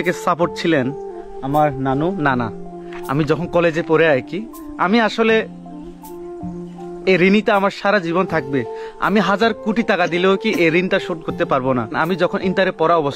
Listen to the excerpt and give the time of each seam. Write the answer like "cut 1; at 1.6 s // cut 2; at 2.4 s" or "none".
cut 1; at 11.9 s